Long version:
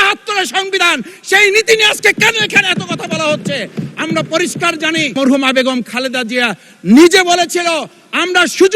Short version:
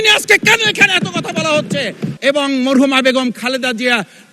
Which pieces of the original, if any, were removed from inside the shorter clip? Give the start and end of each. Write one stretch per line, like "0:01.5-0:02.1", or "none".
0:04.0-0:04.8